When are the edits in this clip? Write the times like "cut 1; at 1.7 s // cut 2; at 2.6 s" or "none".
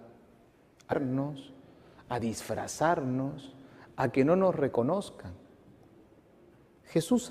none

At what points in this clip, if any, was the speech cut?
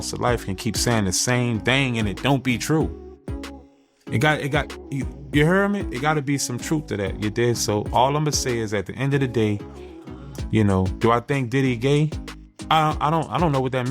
none

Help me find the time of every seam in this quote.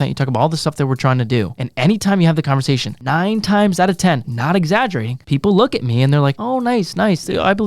cut 1; at 1.6 s // cut 2; at 2.9 s // cut 3; at 4.3 s // cut 4; at 5.1 s // cut 5; at 6.4 s

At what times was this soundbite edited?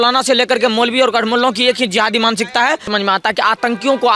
cut 1; at 2.9 s

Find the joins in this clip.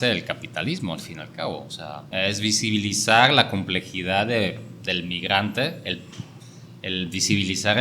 cut 1; at 2.0 s

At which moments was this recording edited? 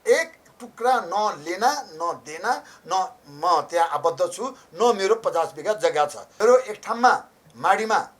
cut 1; at 6.2 s

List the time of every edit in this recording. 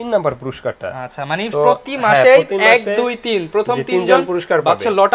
none

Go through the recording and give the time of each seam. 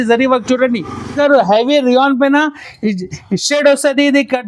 cut 1; at 1.1 s

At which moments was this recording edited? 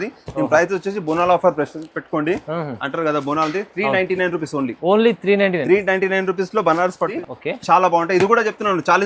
cut 1; at 7.1 s

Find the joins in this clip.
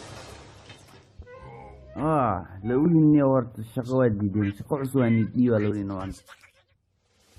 none

